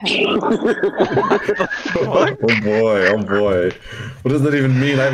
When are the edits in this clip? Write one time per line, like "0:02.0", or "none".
none